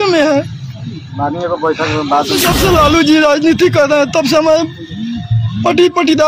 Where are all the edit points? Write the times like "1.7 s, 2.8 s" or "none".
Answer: 2.5 s